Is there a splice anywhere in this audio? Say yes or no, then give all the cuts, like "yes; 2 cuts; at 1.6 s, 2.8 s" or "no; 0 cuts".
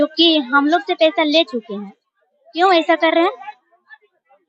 no; 0 cuts